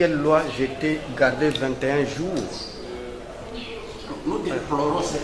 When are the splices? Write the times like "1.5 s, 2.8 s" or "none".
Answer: none